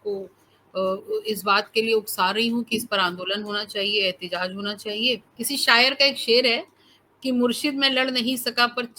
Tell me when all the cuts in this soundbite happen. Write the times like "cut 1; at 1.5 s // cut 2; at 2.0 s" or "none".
cut 1; at 5.3 s

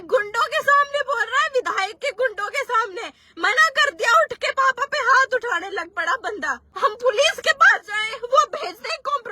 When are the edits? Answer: cut 1; at 6.6 s

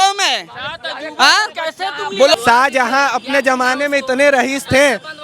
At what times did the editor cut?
cut 1; at 2.4 s

